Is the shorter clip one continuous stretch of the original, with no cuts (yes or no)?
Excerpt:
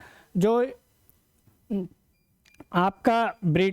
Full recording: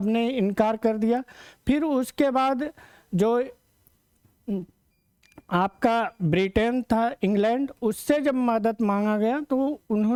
yes